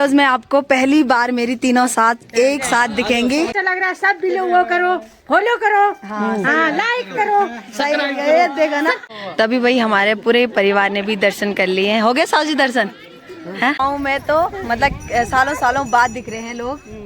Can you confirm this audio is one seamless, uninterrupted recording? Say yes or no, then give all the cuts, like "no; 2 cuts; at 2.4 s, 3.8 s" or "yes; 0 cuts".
no; 3 cuts; at 3.6 s, 9.0 s, 13.8 s